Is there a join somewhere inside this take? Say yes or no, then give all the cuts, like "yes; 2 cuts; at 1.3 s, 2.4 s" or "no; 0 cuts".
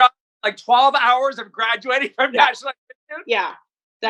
no; 0 cuts